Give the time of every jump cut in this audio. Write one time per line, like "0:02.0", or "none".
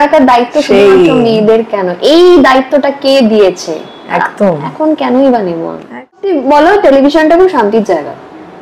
0:06.2

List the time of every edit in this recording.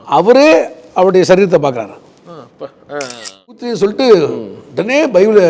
0:03.7

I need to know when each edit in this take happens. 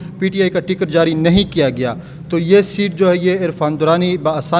none

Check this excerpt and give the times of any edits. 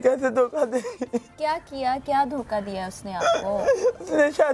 none

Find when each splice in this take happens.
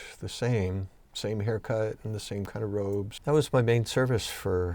0:01.0
0:03.1

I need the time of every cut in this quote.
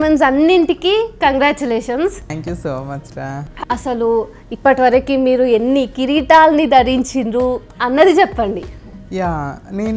0:02.4
0:03.4

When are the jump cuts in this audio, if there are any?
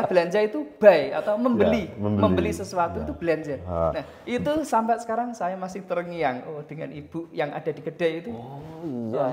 none

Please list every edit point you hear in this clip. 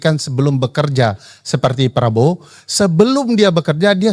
none

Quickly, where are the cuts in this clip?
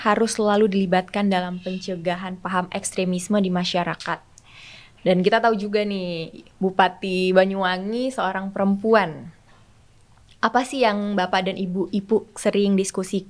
none

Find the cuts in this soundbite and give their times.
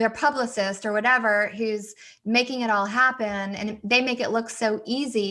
none

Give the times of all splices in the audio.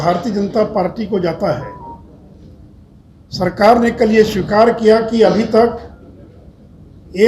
none

